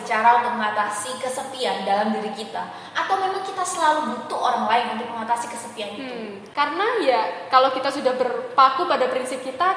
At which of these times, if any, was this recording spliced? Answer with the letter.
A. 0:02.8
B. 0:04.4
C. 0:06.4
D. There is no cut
C